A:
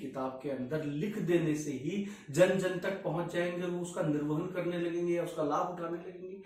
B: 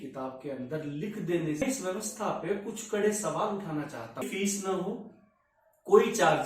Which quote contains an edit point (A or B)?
B